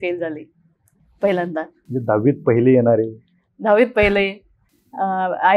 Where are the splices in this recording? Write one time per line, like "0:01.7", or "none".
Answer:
none